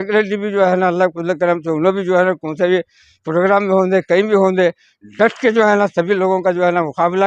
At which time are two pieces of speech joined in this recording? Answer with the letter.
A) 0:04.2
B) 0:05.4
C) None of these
C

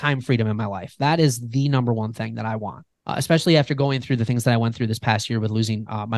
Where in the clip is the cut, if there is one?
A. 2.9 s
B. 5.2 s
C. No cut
A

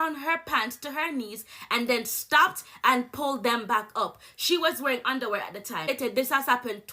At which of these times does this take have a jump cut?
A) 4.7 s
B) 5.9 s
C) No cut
B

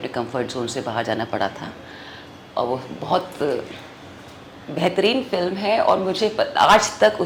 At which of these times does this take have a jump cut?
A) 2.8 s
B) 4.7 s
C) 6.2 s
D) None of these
D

